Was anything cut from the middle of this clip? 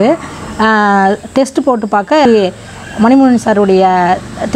yes; 1 cut; at 2.3 s

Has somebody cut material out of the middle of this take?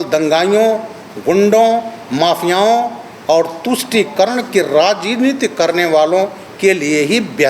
no; 0 cuts

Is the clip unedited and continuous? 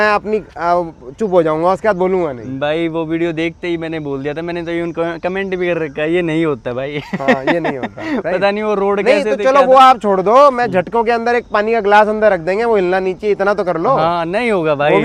yes; 0 cuts

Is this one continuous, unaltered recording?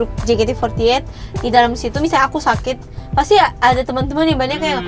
yes; 0 cuts

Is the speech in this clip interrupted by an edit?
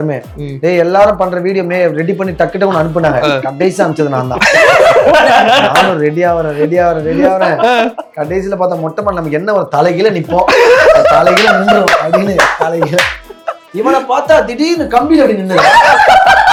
no; 0 cuts

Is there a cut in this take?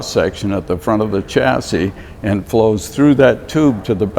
no; 0 cuts

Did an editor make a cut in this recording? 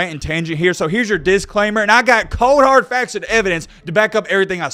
no; 0 cuts

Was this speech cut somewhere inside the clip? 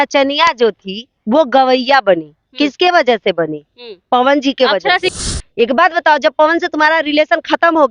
yes; 1 cut; at 5.1 s

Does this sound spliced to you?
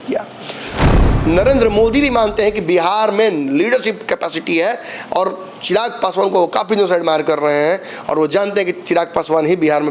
yes; 1 cut; at 0.9 s

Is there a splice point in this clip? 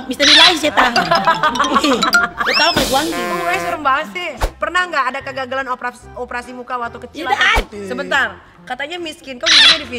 yes; 2 cuts; at 4.6 s, 7.4 s

